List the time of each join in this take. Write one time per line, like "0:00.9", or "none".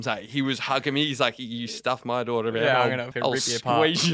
0:03.1